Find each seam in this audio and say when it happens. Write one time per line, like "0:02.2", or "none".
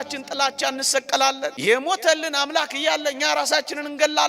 0:01.5